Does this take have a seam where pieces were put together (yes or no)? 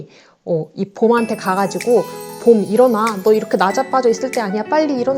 no